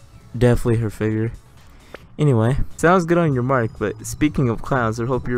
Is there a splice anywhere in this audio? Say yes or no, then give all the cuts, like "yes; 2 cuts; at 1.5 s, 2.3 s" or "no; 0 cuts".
yes; 1 cut; at 2.7 s